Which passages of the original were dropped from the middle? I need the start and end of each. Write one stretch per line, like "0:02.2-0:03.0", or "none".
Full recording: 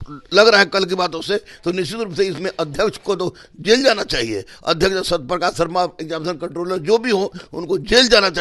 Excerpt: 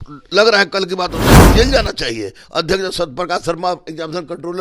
0:01.4-0:03.6